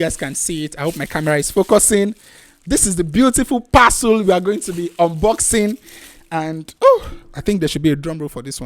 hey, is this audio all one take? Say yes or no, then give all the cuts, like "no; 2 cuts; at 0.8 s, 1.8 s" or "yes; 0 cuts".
yes; 0 cuts